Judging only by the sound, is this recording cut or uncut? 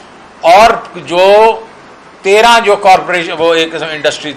uncut